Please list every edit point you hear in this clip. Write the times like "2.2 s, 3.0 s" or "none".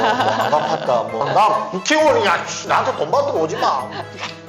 1.2 s